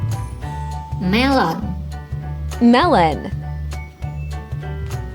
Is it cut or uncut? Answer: cut